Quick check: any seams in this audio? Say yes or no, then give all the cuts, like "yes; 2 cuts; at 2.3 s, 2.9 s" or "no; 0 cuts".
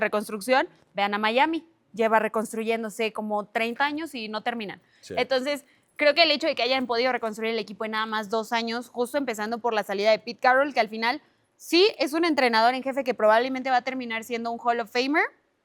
no; 0 cuts